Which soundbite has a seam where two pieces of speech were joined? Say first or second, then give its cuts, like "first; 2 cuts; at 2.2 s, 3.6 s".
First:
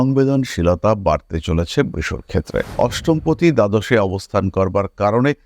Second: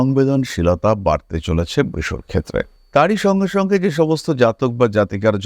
first; 1 cut; at 2.7 s